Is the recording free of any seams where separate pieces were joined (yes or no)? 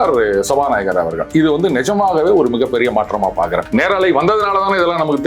no